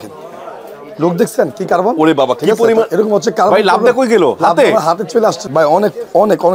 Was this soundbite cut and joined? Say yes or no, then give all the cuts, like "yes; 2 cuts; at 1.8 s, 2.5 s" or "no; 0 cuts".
yes; 1 cut; at 5.4 s